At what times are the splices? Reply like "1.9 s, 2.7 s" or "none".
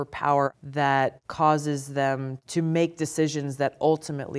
0.8 s, 2.4 s